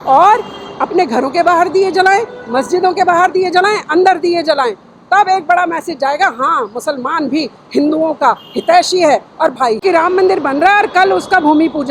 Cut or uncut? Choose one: cut